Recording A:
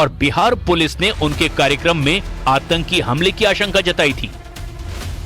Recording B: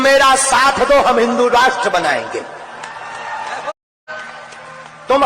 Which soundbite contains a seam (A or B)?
B